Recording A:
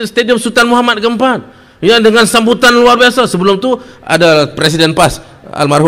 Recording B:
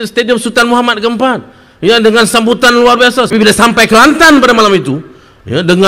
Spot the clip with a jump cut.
B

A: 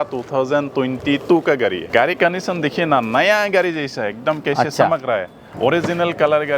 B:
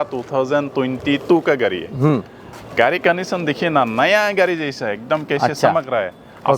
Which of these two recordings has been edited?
A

